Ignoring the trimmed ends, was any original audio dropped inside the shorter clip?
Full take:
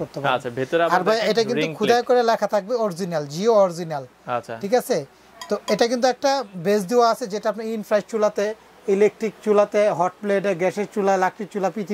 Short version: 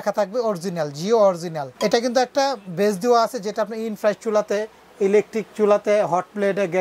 yes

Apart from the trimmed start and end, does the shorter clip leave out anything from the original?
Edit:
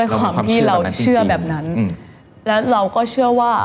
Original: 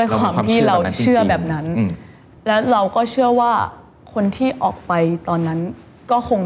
no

